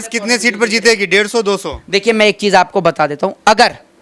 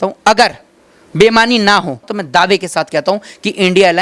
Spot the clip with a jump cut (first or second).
second